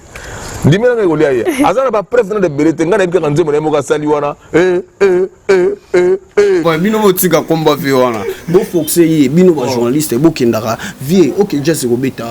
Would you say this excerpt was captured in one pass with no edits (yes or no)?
no